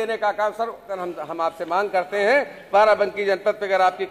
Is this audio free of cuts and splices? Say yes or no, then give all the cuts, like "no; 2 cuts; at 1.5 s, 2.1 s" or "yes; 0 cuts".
no; 1 cut; at 1.0 s